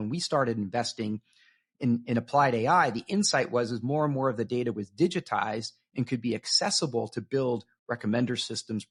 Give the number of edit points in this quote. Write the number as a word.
zero